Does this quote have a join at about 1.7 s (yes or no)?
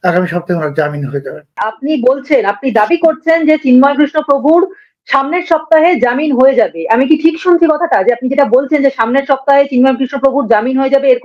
yes